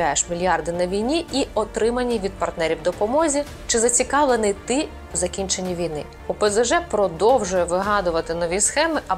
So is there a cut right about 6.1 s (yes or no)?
yes